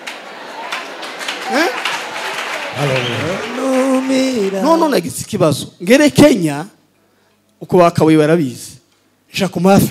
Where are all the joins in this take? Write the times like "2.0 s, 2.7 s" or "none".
4.6 s